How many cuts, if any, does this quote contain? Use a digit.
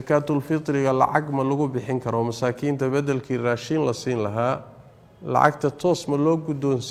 0